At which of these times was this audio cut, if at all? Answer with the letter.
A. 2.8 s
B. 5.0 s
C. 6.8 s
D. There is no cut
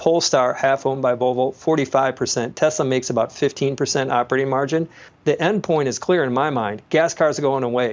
B